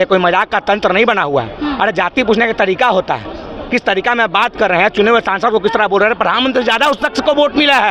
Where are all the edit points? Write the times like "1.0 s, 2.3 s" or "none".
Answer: none

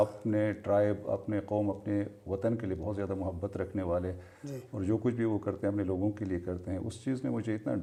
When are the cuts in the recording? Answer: none

